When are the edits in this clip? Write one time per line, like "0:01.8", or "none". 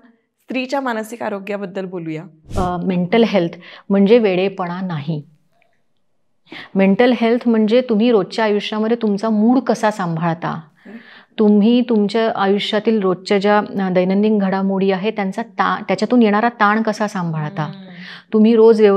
0:02.4